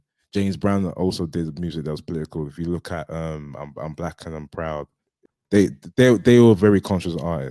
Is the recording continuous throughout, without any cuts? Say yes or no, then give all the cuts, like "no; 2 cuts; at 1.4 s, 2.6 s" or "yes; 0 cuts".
no; 1 cut; at 5.3 s